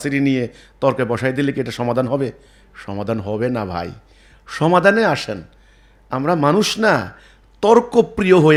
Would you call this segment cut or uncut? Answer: uncut